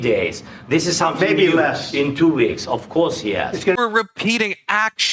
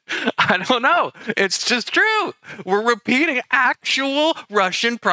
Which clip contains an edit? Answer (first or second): first